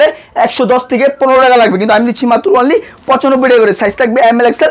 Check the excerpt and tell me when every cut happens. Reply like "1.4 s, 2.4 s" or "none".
none